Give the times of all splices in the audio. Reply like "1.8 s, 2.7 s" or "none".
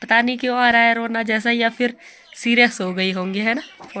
none